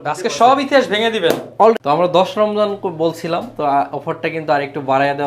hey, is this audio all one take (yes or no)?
no